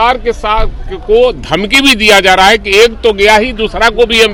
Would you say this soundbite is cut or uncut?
uncut